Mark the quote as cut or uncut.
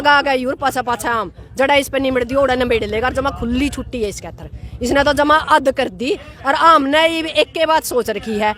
uncut